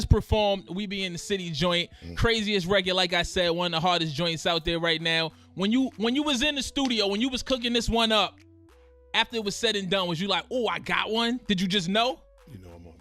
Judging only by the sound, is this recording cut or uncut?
uncut